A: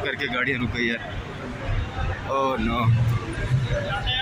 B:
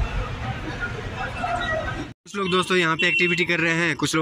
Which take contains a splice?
B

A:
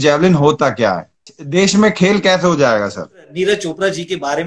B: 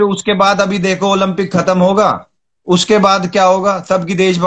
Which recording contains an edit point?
A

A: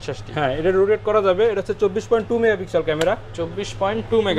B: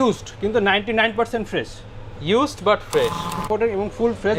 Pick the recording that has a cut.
B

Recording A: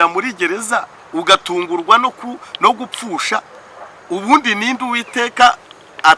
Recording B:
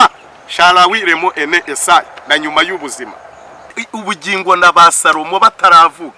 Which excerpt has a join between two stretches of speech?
B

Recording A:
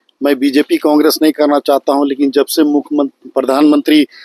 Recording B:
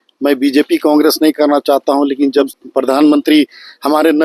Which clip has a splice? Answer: B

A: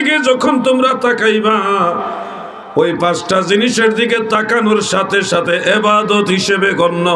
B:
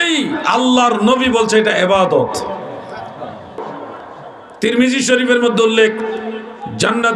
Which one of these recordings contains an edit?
B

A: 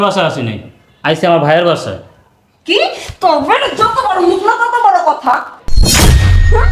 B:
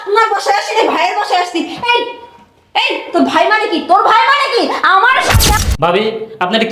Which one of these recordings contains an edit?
B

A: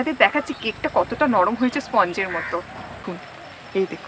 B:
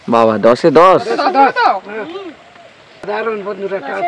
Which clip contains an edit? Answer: B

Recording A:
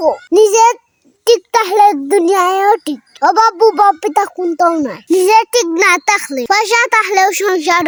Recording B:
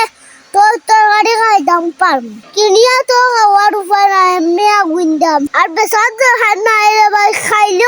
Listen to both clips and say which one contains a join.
B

